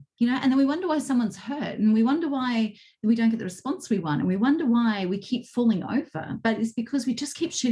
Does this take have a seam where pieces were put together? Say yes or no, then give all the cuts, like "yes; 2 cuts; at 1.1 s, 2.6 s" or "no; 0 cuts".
no; 0 cuts